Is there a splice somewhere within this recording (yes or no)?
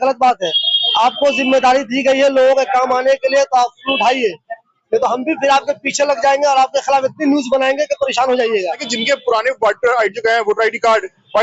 yes